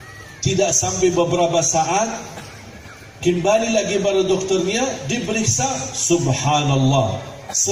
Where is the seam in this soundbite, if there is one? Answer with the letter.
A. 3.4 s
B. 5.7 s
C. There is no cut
C